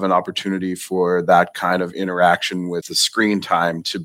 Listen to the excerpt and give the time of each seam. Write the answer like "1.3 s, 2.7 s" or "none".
3.0 s

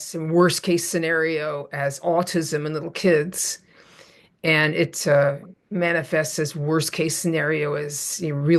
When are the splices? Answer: none

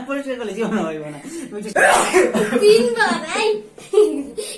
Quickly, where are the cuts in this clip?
1.7 s

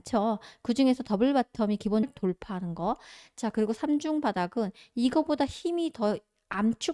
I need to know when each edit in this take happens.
2.0 s

